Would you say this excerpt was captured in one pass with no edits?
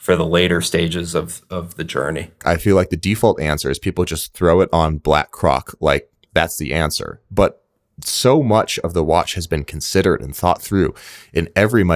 no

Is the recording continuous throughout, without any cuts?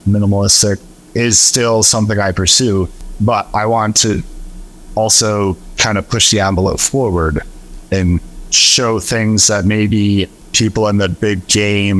no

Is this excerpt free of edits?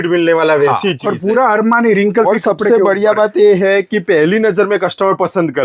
yes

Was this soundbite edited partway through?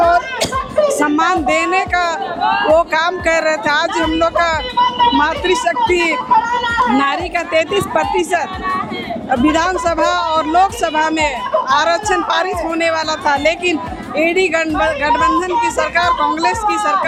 no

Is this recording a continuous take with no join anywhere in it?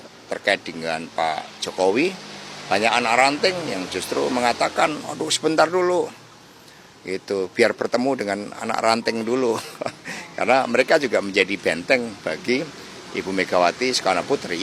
yes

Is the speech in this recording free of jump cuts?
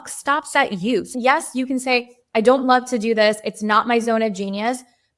no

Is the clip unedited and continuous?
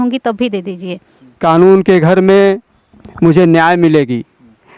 no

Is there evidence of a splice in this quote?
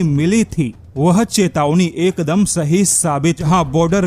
yes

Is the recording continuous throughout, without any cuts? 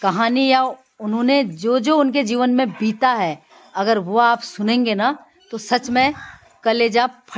yes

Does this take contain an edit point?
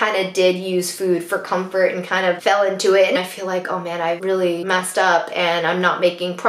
yes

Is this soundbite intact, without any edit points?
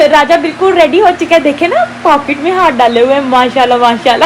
yes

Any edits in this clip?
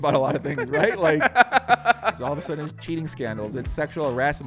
yes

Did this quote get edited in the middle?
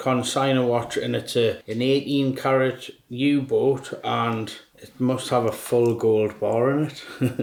no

